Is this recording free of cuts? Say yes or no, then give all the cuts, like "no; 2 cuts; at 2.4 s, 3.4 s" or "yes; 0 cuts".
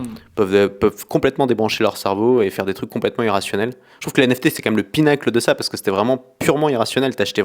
yes; 0 cuts